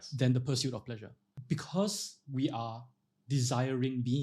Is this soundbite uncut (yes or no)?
no